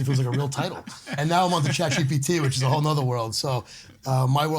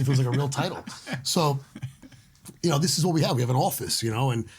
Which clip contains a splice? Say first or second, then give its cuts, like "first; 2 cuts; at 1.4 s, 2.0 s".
first; 1 cut; at 1.2 s